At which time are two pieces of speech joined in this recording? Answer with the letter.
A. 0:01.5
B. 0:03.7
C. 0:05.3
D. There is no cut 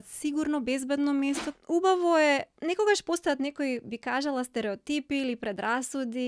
A